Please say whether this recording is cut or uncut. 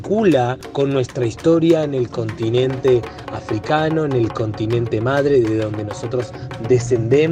uncut